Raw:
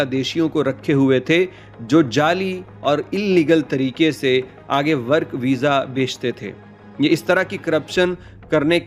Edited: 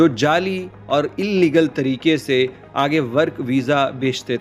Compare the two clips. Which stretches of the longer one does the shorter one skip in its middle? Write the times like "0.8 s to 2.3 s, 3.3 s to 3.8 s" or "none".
none